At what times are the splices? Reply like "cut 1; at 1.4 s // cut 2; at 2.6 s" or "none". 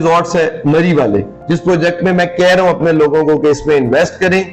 cut 1; at 1.4 s